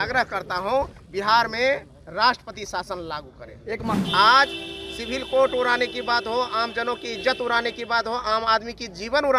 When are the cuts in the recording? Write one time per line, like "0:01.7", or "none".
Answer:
0:04.0

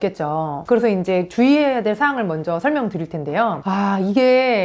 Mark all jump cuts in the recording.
0:03.6

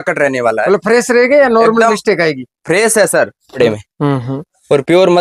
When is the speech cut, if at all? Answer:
0:03.6

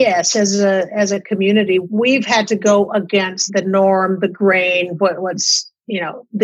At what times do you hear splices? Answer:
0:01.8
0:03.4

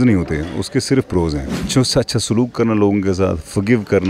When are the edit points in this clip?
0:01.7

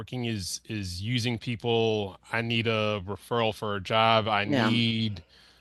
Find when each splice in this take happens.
none

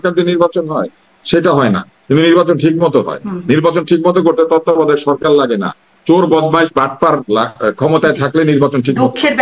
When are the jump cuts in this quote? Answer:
none

